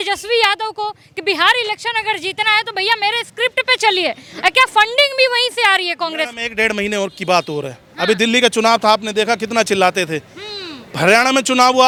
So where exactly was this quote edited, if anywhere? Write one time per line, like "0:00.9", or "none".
none